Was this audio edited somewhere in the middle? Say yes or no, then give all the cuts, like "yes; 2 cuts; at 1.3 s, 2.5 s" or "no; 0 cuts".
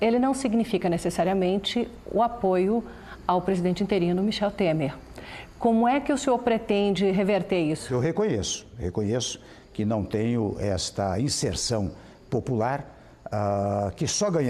yes; 1 cut; at 7.9 s